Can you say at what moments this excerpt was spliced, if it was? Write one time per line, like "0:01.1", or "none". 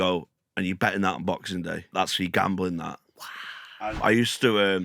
0:01.9
0:03.8